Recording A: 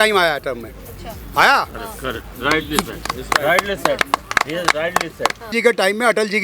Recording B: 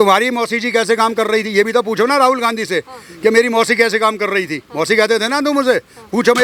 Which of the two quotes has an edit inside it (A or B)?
A